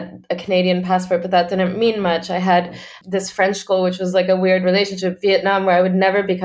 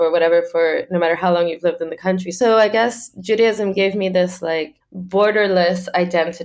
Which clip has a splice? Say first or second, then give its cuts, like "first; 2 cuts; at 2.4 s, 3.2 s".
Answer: second; 1 cut; at 2.3 s